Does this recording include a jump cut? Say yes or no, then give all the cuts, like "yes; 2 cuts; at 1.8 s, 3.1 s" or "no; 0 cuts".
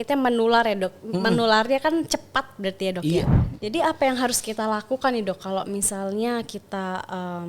yes; 1 cut; at 3.5 s